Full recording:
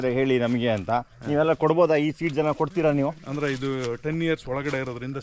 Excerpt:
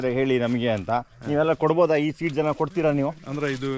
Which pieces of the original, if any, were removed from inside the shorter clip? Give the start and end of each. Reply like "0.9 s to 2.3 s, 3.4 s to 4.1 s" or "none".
none